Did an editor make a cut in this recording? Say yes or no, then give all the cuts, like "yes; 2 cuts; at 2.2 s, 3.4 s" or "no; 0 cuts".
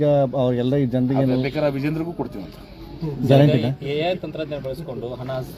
no; 0 cuts